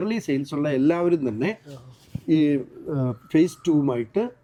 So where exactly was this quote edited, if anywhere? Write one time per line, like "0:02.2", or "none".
none